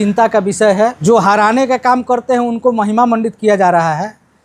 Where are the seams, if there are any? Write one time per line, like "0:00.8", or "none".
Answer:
0:01.0